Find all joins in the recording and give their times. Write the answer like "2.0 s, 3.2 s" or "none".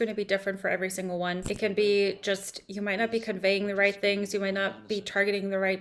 1.4 s